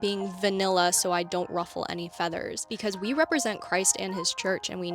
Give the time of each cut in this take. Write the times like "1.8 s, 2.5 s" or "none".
2.6 s

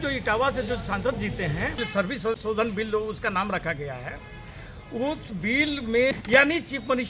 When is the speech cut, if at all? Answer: 2.2 s, 6.1 s

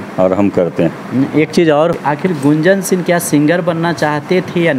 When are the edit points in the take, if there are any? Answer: 1.9 s

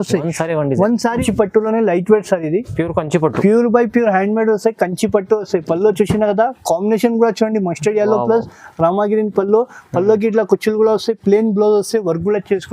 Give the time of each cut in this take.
1.2 s

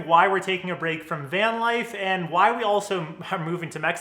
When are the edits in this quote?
none

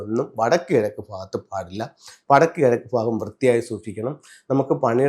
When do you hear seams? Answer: none

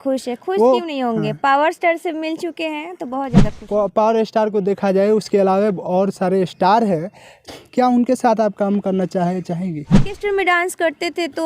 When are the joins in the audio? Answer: 3.6 s, 10.1 s

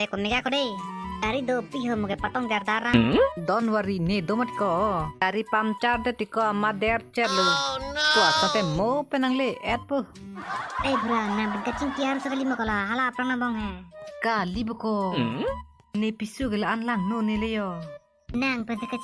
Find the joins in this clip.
5.1 s, 10.5 s

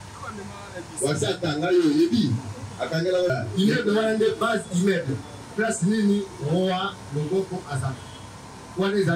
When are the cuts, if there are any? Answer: 3.3 s

